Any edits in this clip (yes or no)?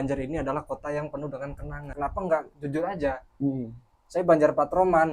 yes